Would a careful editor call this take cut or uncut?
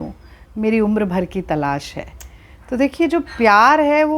uncut